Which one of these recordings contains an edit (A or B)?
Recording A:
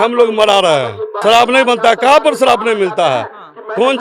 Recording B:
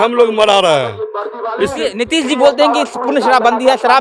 A